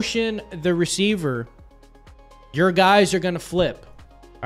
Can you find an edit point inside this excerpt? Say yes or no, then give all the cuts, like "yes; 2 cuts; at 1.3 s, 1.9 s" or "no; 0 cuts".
no; 0 cuts